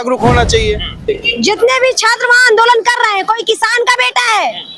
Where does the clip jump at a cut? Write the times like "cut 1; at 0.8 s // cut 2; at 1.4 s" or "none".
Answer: cut 1; at 1.1 s